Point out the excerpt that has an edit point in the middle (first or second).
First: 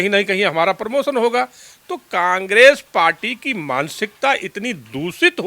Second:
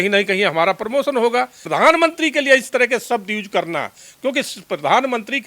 second